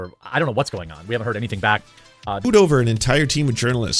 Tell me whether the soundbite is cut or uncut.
cut